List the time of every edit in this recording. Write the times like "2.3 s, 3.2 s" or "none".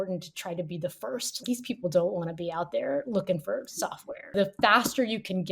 1.4 s, 4.3 s